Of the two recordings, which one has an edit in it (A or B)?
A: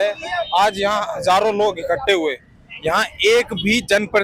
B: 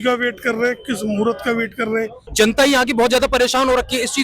B